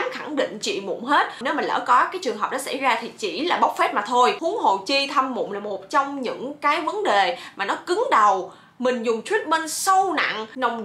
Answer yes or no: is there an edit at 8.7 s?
no